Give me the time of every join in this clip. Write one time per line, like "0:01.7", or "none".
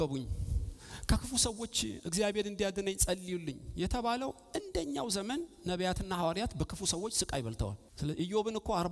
0:07.8